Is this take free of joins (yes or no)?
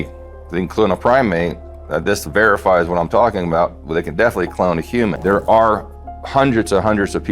no